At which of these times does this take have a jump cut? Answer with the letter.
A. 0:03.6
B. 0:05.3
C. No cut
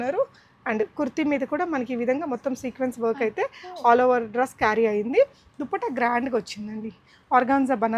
C